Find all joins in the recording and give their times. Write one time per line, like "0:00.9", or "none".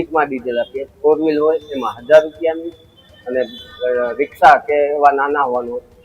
none

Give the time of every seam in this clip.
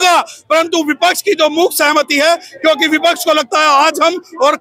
none

